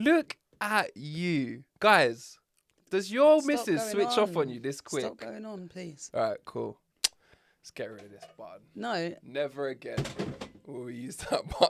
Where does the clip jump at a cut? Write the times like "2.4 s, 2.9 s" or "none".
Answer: none